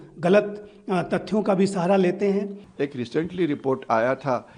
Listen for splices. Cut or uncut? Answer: cut